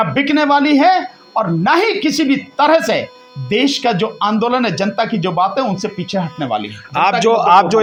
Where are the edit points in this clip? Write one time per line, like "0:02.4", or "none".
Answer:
none